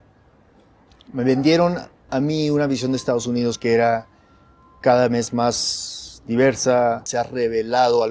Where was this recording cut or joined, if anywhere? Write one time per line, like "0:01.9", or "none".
0:07.0